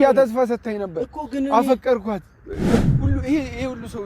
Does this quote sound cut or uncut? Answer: cut